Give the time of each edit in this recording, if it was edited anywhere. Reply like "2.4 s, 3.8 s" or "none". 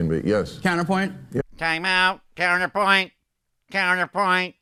none